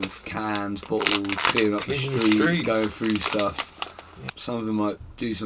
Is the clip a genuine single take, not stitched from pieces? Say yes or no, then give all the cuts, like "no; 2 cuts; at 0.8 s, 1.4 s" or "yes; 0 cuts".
no; 1 cut; at 4.2 s